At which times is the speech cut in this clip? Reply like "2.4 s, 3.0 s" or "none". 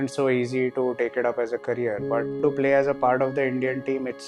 2.4 s

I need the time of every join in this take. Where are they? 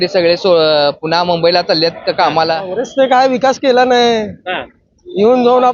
2.3 s

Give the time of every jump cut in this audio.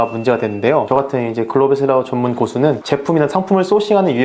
0.9 s, 2.8 s

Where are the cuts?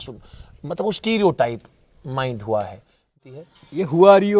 3.1 s

